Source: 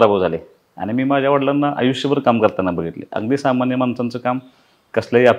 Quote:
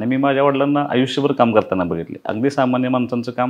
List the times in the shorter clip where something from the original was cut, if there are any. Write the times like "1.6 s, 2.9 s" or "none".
none